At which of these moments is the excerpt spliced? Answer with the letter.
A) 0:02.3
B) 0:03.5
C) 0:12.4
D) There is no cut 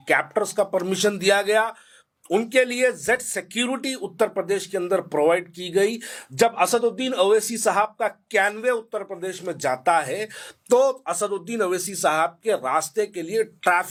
D